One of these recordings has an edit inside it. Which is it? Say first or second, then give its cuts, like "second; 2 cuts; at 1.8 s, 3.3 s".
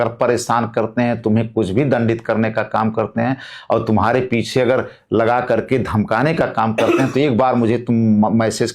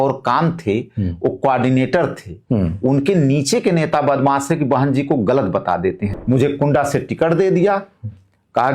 second; 1 cut; at 6.1 s